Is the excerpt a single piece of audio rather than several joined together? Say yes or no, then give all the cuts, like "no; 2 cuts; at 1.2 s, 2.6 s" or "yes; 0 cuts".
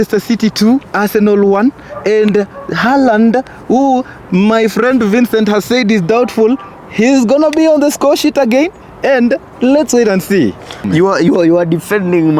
no; 1 cut; at 10.8 s